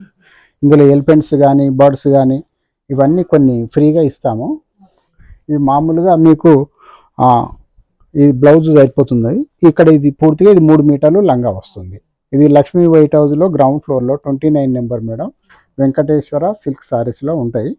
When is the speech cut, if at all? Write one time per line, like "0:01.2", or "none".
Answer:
none